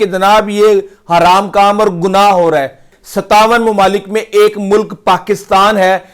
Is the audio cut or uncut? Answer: cut